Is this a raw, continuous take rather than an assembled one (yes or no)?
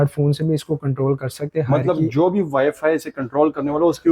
yes